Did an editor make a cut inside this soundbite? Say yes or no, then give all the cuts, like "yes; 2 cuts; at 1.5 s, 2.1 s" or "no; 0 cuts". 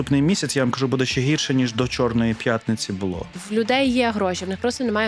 yes; 1 cut; at 3.4 s